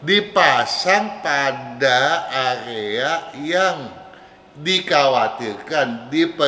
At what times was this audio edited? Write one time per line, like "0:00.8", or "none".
none